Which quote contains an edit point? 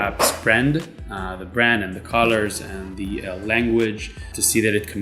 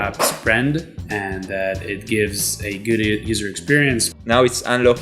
second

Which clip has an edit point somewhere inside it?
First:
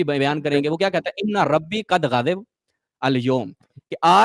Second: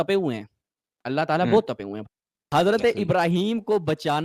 second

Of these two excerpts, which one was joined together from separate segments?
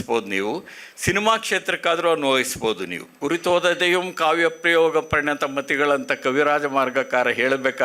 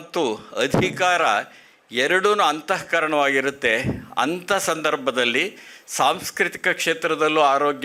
first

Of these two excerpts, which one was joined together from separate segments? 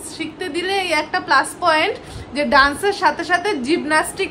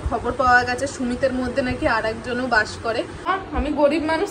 second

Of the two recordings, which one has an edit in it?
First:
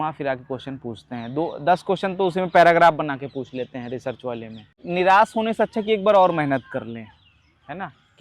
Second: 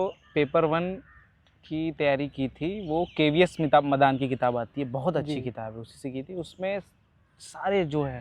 first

